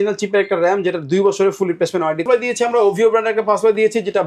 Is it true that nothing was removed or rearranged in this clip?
no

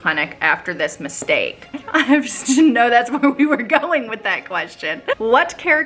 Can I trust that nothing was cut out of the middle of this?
no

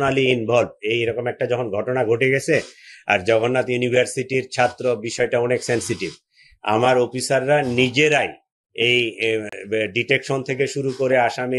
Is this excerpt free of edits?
yes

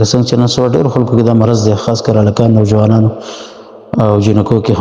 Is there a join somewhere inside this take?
no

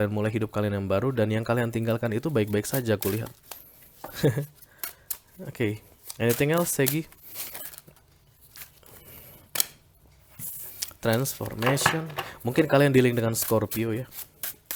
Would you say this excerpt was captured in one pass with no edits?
yes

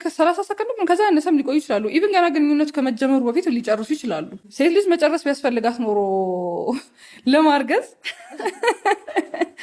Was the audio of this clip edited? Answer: yes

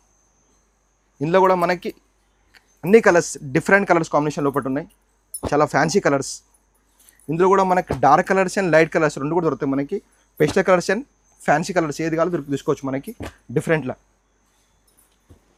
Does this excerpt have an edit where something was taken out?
no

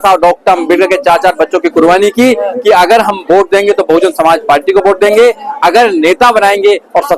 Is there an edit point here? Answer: no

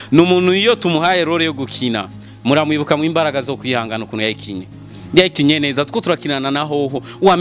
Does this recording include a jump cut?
no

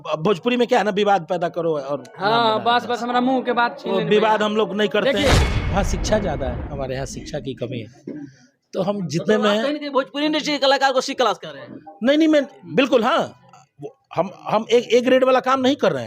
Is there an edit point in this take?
yes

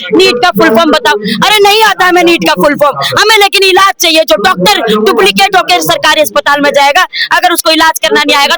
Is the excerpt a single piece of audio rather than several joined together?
yes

